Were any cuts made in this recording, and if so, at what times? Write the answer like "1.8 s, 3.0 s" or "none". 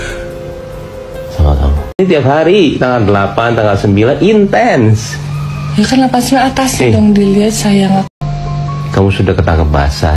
2.0 s, 8.1 s

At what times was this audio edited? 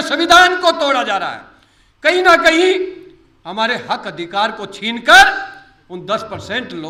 none

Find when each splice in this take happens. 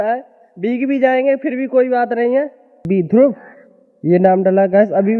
2.8 s

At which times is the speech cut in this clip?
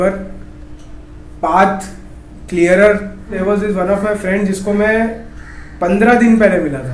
3.4 s

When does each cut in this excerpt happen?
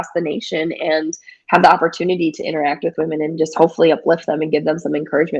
none

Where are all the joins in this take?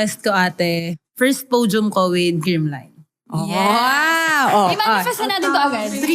1.0 s

